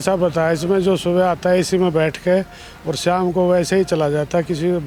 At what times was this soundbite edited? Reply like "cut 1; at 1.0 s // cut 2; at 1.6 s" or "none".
none